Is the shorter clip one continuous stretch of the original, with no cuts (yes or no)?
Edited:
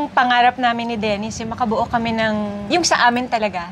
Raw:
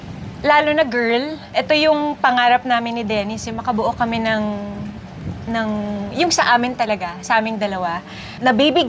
no